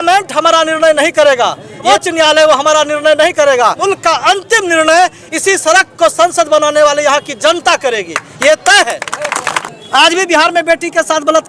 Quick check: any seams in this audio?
yes; 3 cuts; at 1.8 s, 3.8 s, 9.5 s

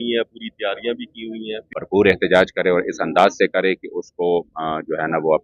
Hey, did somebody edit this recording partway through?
yes; 1 cut; at 1.7 s

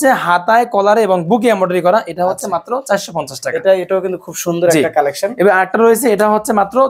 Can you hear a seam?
no; 0 cuts

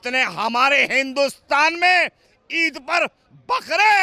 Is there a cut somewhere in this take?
no; 0 cuts

